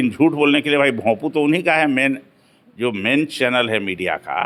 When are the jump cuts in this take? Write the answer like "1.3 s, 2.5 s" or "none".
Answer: none